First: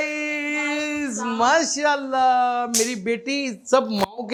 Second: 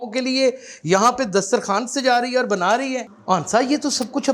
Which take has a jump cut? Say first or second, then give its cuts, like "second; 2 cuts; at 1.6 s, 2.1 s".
second; 1 cut; at 3.1 s